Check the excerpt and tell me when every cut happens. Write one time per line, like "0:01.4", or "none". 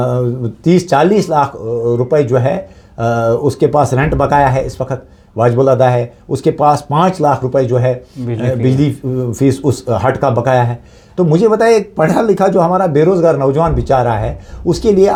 none